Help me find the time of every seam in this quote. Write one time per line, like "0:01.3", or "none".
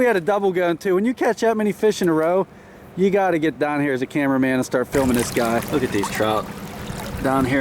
0:05.7